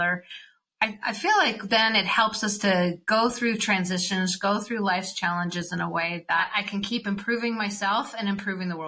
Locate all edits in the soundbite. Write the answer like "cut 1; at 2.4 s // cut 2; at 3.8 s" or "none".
cut 1; at 6.4 s